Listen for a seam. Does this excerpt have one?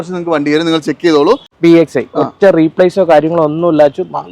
yes; 1 cut; at 1.5 s

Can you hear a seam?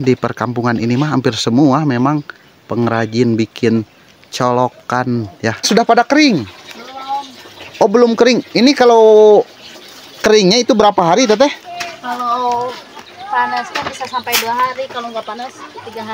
yes; 1 cut; at 5.7 s

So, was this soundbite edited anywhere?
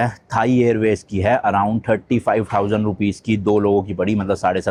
no; 0 cuts

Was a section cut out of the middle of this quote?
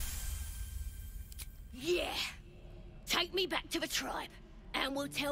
no; 0 cuts

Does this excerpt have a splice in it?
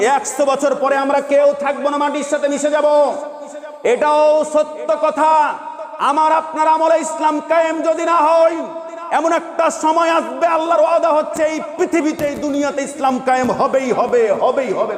no; 0 cuts

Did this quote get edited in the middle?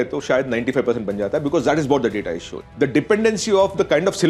no; 0 cuts

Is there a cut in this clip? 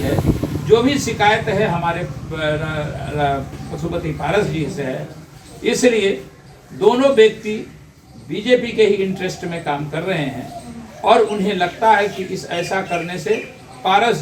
no; 0 cuts

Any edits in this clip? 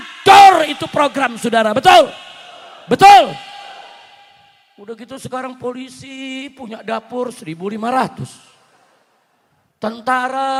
no; 0 cuts

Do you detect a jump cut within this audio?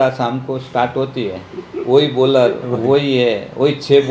no; 0 cuts

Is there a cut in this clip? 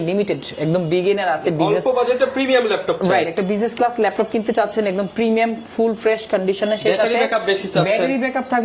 no; 0 cuts

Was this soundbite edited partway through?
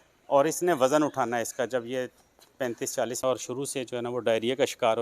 yes; 1 cut; at 3.0 s

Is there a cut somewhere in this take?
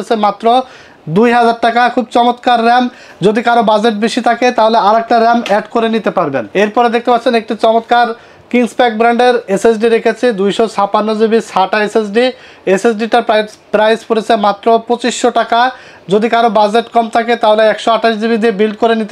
no; 0 cuts

